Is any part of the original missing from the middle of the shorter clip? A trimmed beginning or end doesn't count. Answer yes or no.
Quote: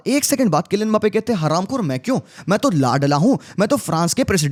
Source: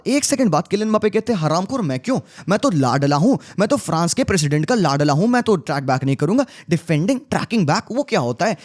no